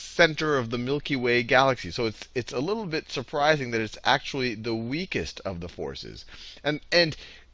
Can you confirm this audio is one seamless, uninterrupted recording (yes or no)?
no